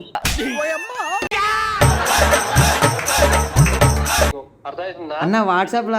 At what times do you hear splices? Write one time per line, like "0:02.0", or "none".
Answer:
0:04.5